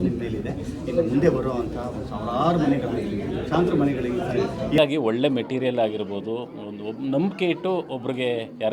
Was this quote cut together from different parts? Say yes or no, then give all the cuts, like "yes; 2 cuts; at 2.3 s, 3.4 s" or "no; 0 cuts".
yes; 1 cut; at 4.8 s